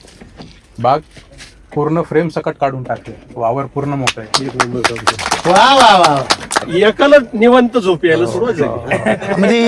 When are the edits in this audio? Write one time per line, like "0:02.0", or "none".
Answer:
0:06.6